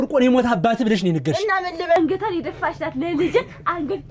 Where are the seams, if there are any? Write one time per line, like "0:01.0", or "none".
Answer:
0:02.0